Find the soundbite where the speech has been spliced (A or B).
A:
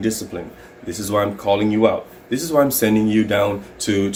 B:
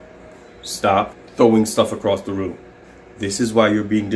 B